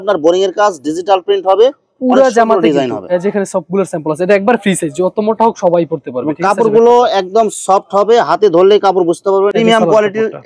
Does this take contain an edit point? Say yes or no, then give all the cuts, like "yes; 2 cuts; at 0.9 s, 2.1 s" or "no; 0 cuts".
no; 0 cuts